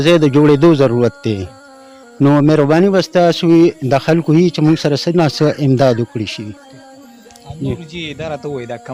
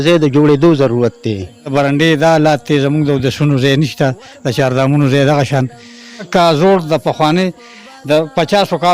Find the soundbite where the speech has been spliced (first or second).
second